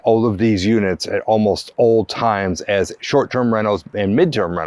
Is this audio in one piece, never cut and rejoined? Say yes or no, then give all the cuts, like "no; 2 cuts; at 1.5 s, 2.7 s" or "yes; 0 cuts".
yes; 0 cuts